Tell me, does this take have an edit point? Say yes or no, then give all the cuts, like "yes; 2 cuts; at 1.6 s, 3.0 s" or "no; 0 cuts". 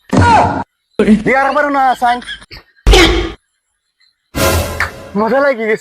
yes; 1 cut; at 1.0 s